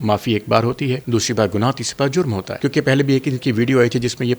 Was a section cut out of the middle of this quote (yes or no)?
yes